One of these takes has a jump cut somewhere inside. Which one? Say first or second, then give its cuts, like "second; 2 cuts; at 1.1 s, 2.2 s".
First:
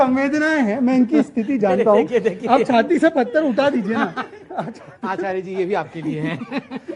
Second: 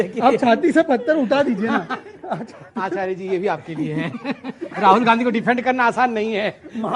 second; 1 cut; at 5.8 s